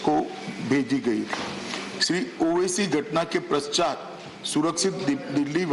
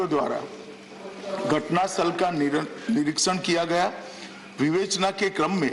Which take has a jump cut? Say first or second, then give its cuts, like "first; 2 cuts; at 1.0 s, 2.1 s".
first; 1 cut; at 1.0 s